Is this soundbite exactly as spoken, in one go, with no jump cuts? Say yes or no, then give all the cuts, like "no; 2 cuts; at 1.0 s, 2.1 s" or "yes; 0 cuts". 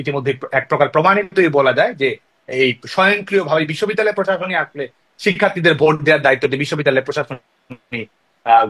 yes; 0 cuts